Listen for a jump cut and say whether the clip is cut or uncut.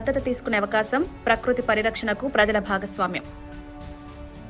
uncut